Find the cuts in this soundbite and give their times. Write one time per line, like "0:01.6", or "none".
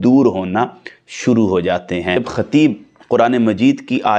0:02.2